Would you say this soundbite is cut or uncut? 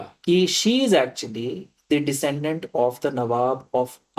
uncut